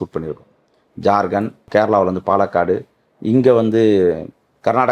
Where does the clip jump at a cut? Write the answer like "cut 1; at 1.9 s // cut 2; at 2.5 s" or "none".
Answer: cut 1; at 1.7 s